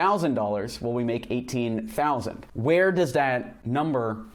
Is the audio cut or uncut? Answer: uncut